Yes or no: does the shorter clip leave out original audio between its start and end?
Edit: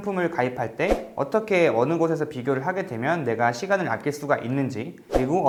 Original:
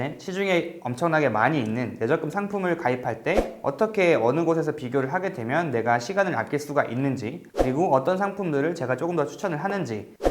no